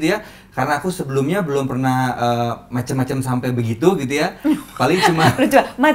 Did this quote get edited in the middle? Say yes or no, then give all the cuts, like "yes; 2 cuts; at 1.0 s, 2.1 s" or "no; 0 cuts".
no; 0 cuts